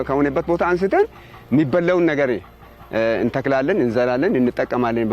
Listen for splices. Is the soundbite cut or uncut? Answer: uncut